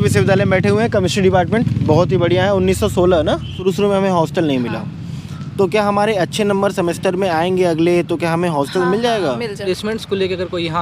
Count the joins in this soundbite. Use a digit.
2